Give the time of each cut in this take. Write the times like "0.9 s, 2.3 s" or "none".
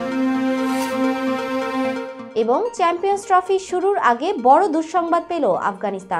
none